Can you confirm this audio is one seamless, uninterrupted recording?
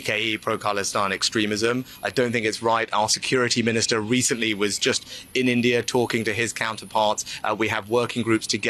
yes; 0 cuts

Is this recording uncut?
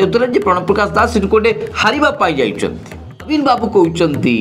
no; 1 cut; at 3.3 s

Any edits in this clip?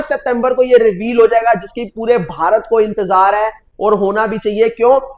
no; 0 cuts

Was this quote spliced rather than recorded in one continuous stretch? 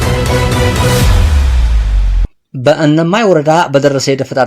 yes; 1 cut; at 2.3 s

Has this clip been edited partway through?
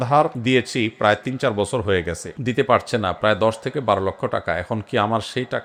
no; 0 cuts

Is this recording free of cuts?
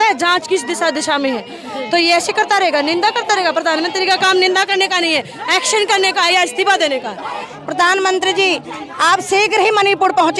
no; 1 cut; at 7.5 s

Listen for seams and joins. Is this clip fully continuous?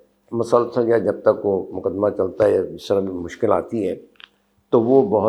yes; 0 cuts

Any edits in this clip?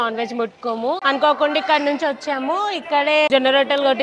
yes; 1 cut; at 1.0 s

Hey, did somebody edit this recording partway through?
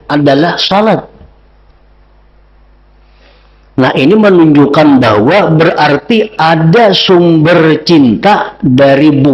no; 0 cuts

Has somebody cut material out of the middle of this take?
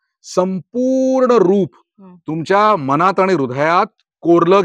no; 0 cuts

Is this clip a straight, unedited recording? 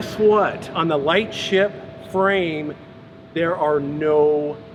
yes; 0 cuts

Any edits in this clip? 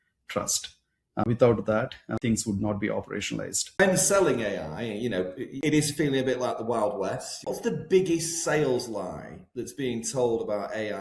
yes; 5 cuts; at 1.2 s, 2.2 s, 3.8 s, 5.6 s, 7.4 s

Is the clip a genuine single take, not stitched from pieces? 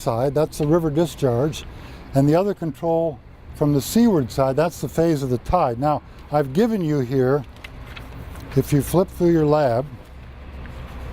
no; 1 cut; at 3.0 s

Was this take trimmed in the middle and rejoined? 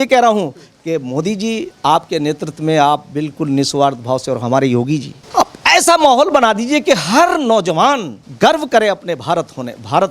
yes; 2 cuts; at 5.2 s, 8.2 s

